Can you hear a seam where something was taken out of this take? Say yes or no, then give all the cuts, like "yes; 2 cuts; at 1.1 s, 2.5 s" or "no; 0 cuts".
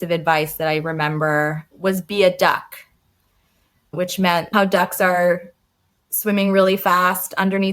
yes; 2 cuts; at 1.6 s, 4.5 s